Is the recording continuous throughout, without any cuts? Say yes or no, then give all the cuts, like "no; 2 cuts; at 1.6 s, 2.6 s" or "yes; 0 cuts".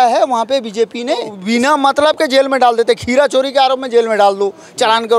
no; 1 cut; at 1.4 s